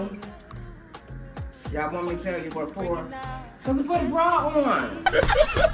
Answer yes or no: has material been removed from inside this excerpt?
no